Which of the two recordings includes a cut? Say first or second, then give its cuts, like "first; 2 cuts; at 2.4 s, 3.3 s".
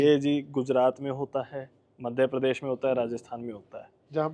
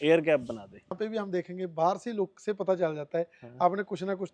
second; 1 cut; at 1.0 s